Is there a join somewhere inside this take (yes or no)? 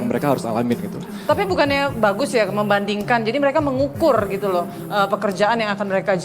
no